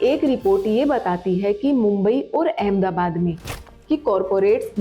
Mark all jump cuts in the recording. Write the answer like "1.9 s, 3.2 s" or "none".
3.5 s